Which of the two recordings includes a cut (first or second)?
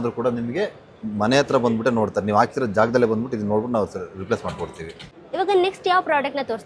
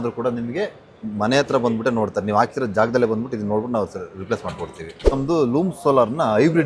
second